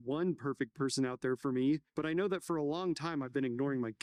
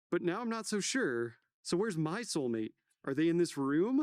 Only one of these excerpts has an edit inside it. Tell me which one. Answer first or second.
second